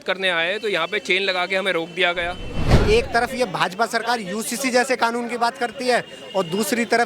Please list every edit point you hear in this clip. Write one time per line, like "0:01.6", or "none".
0:02.8